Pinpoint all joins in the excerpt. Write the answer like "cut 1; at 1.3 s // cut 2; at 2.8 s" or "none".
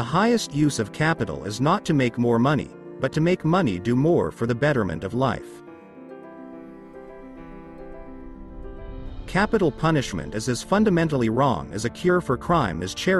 cut 1; at 5.6 s // cut 2; at 9.1 s